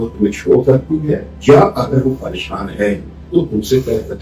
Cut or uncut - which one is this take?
uncut